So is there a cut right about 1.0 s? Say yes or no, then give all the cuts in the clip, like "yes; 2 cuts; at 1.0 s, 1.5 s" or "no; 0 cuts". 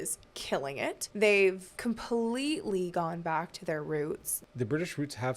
yes; 3 cuts; at 1.0 s, 1.7 s, 4.3 s